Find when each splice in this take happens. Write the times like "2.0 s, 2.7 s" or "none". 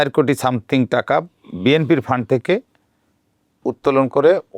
none